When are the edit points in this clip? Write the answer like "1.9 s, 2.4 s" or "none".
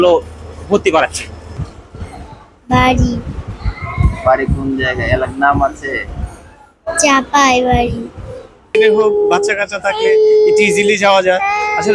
1.6 s, 8.7 s